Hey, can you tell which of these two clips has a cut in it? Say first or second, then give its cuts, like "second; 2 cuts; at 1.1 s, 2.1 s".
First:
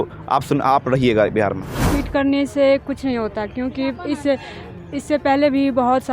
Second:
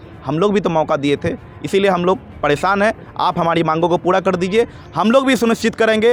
first; 1 cut; at 1.9 s